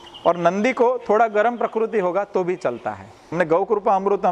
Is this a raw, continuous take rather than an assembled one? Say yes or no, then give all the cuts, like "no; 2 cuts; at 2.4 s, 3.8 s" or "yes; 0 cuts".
no; 1 cut; at 3.3 s